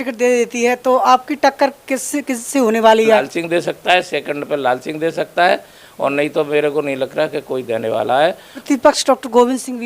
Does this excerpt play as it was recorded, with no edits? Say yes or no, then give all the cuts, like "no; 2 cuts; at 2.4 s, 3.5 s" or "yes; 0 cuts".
no; 2 cuts; at 3.3 s, 8.6 s